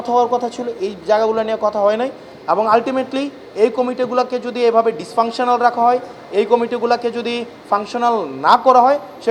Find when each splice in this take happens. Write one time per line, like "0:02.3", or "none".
none